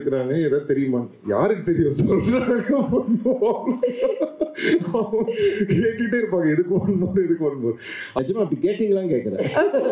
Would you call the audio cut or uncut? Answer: cut